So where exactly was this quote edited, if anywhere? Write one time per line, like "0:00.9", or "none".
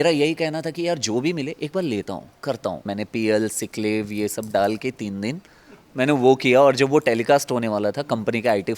0:02.9